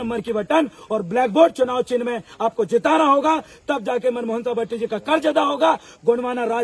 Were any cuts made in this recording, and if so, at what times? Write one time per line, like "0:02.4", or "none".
none